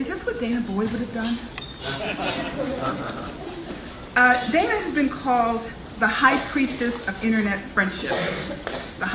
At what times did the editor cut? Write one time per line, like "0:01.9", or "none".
0:08.1